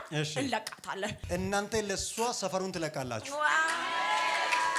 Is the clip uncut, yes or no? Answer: no